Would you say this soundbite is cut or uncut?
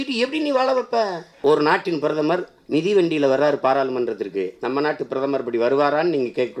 cut